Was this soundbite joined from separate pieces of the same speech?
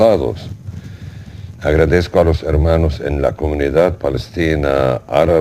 yes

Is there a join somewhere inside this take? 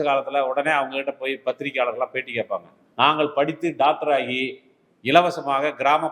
yes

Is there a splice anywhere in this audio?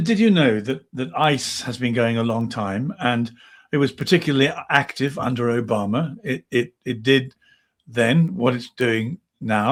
no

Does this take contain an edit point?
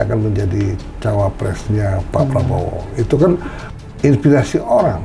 yes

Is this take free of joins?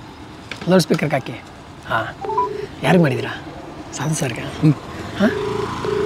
yes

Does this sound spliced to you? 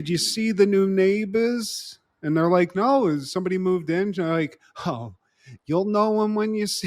no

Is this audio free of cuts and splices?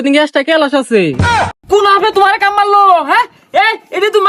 no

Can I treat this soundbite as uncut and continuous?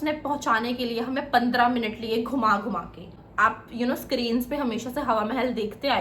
no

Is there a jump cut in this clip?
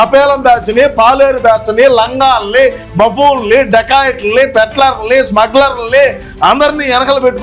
no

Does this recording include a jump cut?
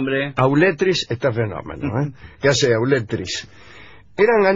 no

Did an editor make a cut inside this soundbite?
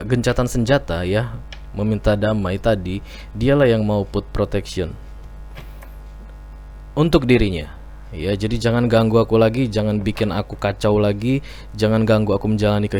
no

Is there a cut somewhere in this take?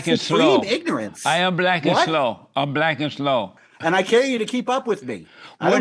yes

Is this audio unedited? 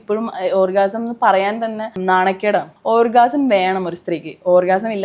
no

